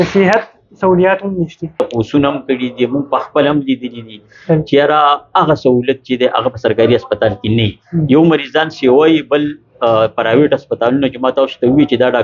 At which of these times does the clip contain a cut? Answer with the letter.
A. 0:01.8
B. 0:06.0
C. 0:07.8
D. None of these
A